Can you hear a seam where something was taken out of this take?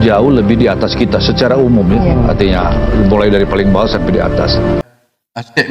yes; 1 cut; at 4.8 s

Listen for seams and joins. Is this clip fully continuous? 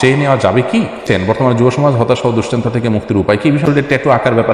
no; 2 cuts; at 1.1 s, 3.4 s

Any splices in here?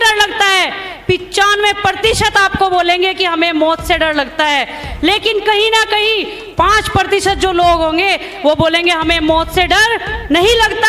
no; 0 cuts

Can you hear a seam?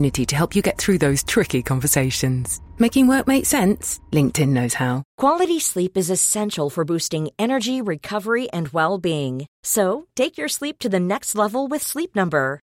yes; 1 cut; at 5.1 s

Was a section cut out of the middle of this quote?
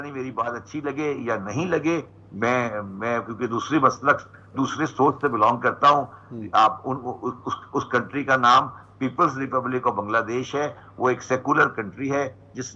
no; 0 cuts

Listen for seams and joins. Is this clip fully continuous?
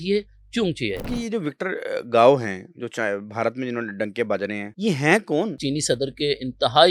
no; 3 cuts; at 1.1 s, 4.7 s, 5.6 s

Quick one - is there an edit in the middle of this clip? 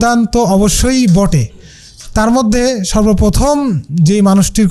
no; 0 cuts

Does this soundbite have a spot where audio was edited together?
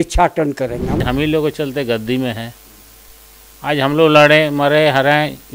yes; 1 cut; at 1.0 s

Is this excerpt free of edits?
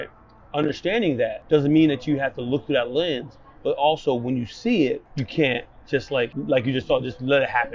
no; 3 cuts; at 1.4 s, 5.2 s, 6.4 s

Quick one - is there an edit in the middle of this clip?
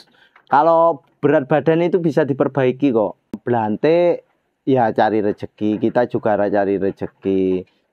yes; 1 cut; at 3.4 s

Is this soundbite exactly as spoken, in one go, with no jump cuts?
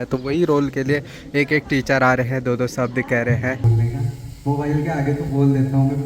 no; 1 cut; at 3.6 s

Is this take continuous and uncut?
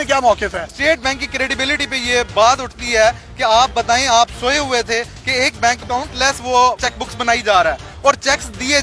yes; 0 cuts

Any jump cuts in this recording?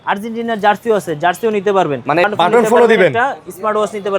yes; 1 cut; at 2.3 s

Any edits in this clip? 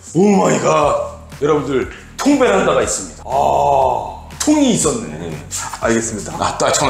no; 0 cuts

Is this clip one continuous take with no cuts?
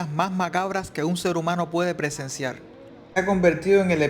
no; 1 cut; at 3.2 s

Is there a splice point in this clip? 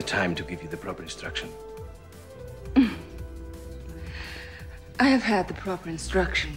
no; 0 cuts

